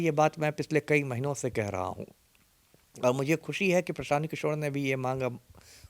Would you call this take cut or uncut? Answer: uncut